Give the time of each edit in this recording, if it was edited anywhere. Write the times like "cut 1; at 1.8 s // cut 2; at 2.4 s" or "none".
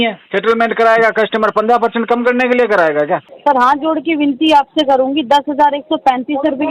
cut 1; at 3.3 s